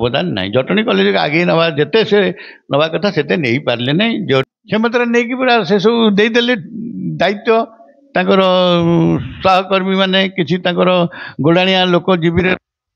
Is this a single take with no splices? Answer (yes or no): yes